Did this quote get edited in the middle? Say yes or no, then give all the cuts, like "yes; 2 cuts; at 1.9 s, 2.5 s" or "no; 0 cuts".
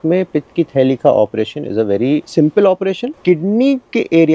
yes; 2 cuts; at 2.3 s, 3.2 s